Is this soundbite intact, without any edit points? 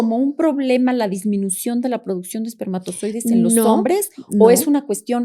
yes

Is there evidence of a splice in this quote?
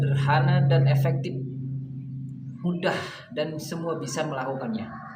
yes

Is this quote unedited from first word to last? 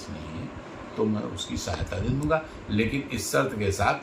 yes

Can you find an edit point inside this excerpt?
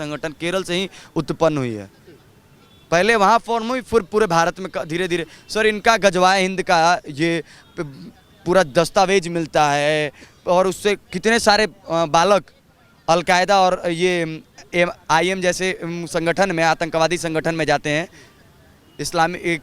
no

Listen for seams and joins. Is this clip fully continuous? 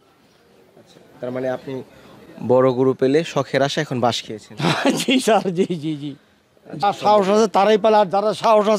no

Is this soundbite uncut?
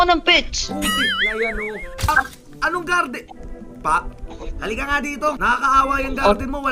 no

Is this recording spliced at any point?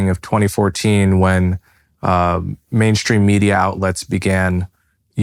no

